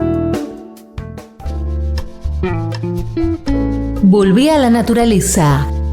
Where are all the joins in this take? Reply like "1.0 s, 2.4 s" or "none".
1.2 s

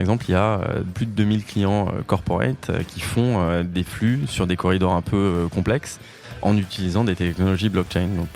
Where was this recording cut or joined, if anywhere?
0.9 s

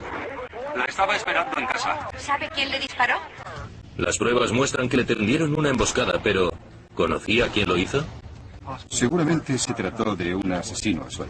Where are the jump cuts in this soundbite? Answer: 9.4 s

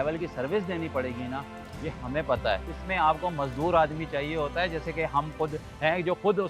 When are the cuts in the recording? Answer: 2.7 s

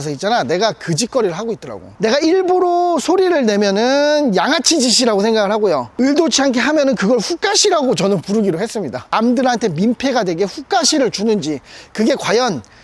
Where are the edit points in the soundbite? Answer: 1.9 s, 9.1 s

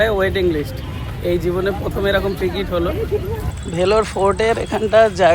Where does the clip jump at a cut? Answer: 3.5 s

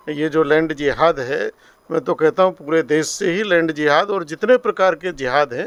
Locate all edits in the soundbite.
none

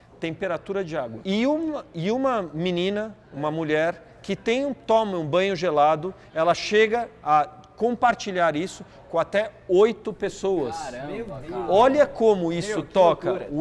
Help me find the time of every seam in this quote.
1.2 s

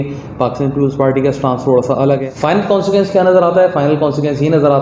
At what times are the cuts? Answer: 2.3 s

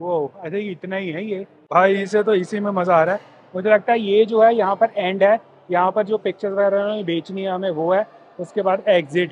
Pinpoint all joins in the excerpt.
1.6 s

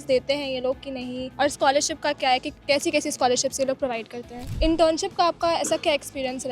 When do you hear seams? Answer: 1.2 s, 4.5 s

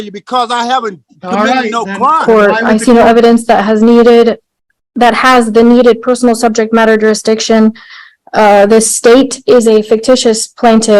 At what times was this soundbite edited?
2.2 s

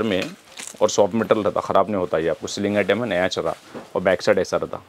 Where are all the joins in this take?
none

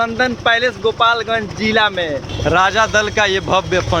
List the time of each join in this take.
2.3 s

